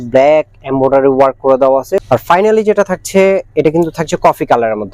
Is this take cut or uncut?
cut